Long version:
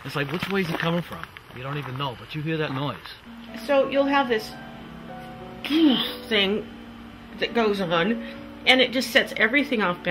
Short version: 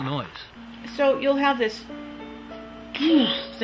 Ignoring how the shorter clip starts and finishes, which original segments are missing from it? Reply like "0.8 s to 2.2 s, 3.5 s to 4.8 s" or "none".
none

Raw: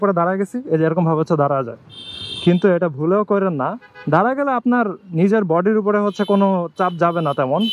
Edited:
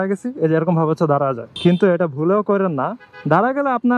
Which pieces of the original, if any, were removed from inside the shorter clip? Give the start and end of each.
1.8 s to 2.3 s

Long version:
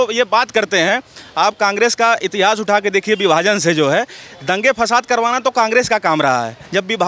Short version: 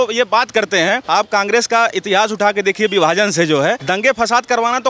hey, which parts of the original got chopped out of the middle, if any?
1.0 s to 1.3 s, 4.1 s to 4.4 s

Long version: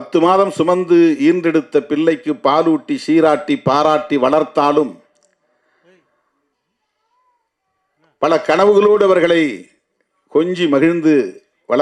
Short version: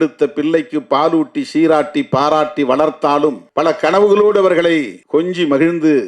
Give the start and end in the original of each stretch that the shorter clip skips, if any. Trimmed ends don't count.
5.0 s to 8.1 s, 9.6 s to 10.2 s

